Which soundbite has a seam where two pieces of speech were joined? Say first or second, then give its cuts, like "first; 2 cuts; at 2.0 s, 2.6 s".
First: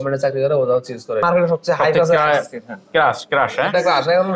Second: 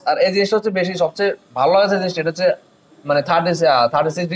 first; 1 cut; at 1.2 s